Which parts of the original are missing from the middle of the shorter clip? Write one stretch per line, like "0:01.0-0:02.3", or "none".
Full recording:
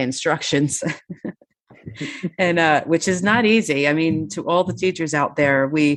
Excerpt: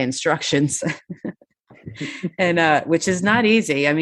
none